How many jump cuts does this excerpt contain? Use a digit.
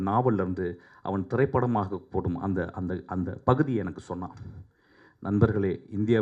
0